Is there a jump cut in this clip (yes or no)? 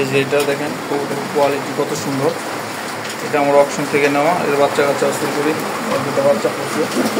no